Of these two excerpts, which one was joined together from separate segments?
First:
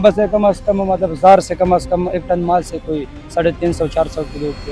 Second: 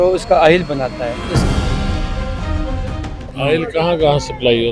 second; 2 cuts; at 1.4 s, 3.2 s

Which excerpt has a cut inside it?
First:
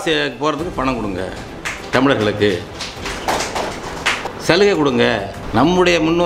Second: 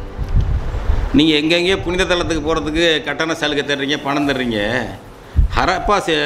first; 2 cuts; at 4.3 s, 5.4 s

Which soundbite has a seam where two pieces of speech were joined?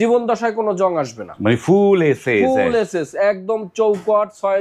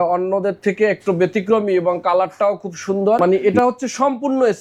second; 1 cut; at 3.2 s

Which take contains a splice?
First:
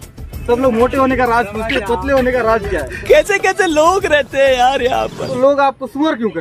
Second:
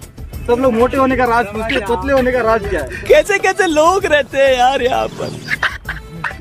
first; 1 cut; at 5.4 s

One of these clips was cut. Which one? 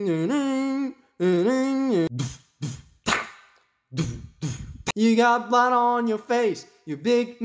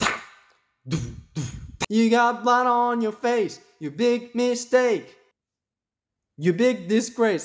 first; 1 cut; at 2.1 s

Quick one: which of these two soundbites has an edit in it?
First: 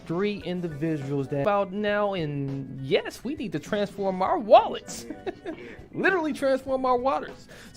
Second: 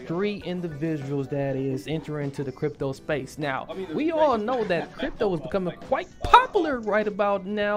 first; 1 cut; at 1.4 s

